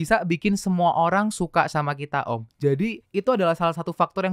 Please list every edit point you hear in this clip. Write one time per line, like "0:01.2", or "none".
0:03.0